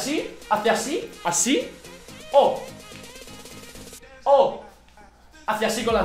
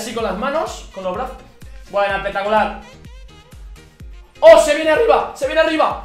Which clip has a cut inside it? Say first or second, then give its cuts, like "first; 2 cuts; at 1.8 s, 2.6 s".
second; 2 cuts; at 2.9 s, 4.4 s